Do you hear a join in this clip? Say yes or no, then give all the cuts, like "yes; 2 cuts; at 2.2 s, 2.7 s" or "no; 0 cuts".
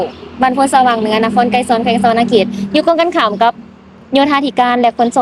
no; 0 cuts